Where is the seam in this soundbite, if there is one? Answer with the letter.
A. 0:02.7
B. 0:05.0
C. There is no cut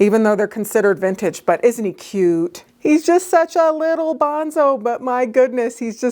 A